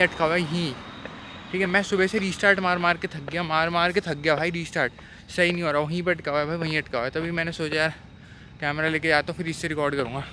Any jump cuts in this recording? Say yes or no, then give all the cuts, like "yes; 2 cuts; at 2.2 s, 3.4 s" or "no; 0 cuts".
no; 0 cuts